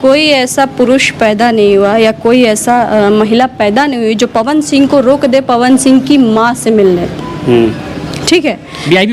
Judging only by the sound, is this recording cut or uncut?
uncut